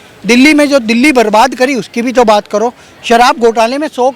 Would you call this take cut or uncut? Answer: uncut